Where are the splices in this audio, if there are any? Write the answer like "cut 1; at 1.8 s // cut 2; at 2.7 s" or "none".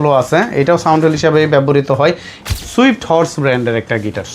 cut 1; at 2.3 s